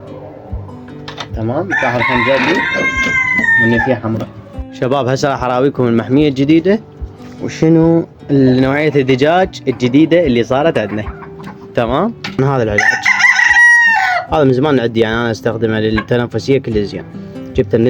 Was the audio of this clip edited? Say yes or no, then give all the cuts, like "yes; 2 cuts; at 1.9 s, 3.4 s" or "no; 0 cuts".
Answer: yes; 2 cuts; at 4.7 s, 12.4 s